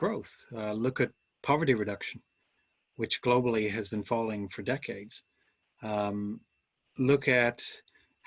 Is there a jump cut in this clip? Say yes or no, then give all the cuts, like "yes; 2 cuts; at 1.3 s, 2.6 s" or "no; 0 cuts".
no; 0 cuts